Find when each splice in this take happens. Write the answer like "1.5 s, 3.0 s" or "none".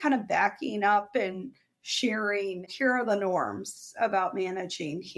2.7 s